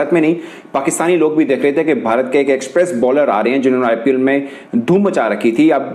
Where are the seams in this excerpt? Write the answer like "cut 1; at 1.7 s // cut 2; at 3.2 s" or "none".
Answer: none